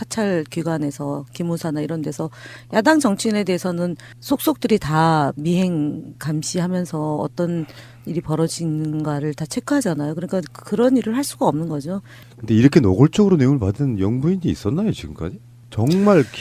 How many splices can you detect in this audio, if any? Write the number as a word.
one